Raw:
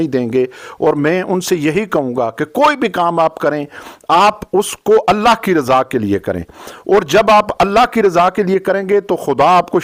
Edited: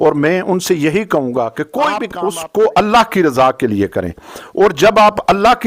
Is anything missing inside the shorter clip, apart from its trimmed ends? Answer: yes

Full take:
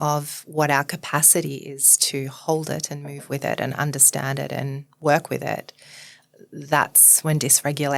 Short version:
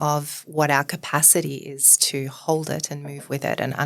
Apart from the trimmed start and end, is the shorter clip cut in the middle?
no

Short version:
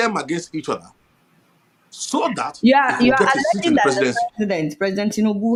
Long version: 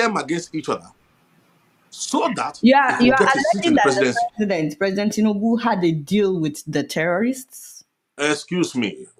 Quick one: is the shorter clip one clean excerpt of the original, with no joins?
yes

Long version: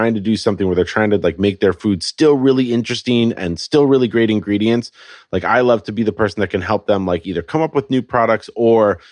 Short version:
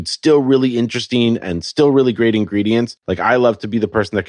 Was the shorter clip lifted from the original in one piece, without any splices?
no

